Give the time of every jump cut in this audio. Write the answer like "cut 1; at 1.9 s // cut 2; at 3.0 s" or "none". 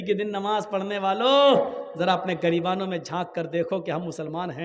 none